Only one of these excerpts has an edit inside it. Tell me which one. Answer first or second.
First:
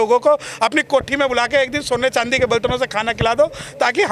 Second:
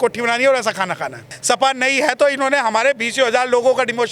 second